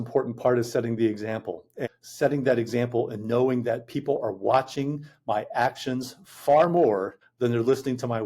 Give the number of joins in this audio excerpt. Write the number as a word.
two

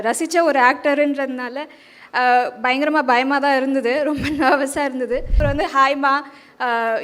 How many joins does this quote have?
one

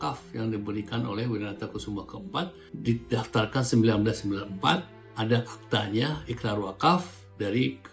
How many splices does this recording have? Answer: two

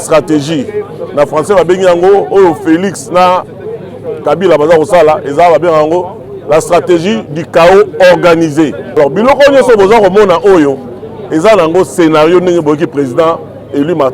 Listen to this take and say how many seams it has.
one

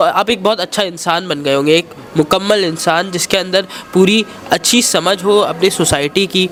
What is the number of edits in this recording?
zero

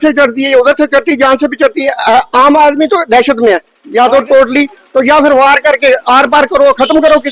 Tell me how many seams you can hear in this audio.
one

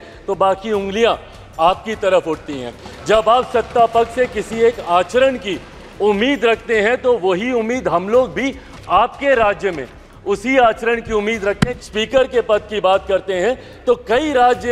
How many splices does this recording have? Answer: one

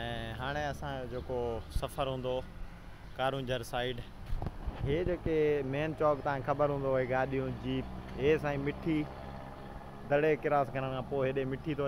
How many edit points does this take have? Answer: zero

